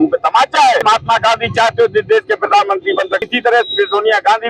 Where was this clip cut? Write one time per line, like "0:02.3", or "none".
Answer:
0:00.8
0:03.3